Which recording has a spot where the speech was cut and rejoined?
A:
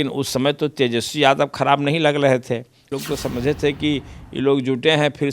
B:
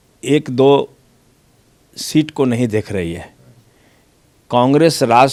A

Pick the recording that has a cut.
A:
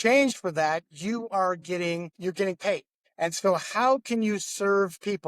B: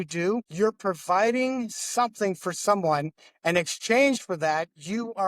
A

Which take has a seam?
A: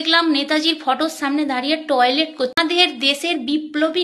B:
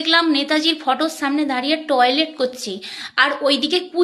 A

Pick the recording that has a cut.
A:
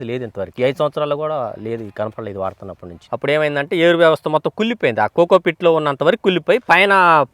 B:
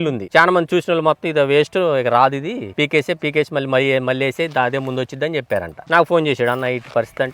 A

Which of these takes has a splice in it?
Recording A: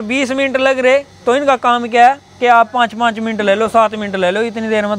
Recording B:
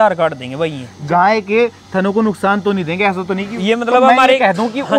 B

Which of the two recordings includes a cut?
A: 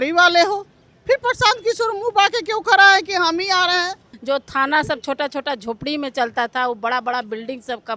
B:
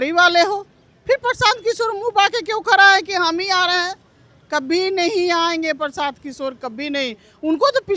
A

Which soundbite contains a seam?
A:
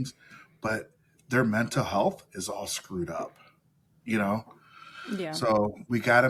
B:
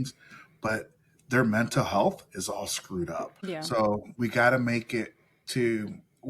B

